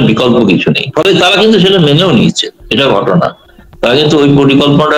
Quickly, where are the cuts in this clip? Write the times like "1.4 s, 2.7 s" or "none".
none